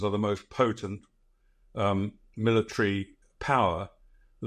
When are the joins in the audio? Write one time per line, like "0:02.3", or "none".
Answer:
none